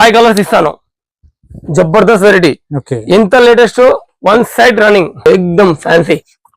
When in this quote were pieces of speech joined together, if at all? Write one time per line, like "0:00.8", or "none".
0:05.2